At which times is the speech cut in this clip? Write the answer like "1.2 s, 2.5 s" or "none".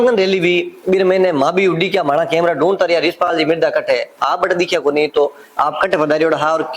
none